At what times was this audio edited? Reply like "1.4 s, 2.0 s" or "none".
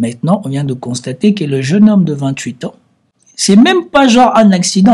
none